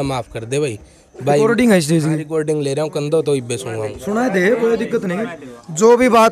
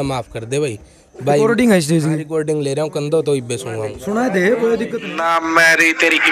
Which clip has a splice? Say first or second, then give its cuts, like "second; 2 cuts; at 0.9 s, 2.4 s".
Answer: second; 1 cut; at 5.1 s